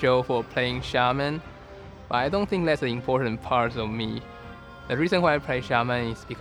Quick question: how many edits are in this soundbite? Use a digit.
0